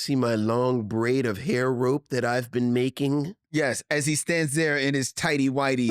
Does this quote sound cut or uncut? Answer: cut